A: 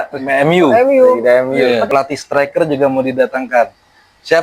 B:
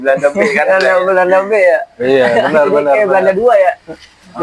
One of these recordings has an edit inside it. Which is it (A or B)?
A